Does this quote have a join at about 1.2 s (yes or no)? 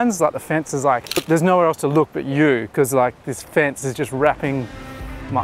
yes